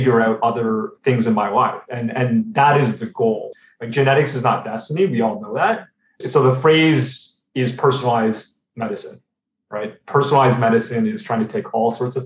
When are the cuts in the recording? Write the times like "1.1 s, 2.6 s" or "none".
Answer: 3.5 s, 6.2 s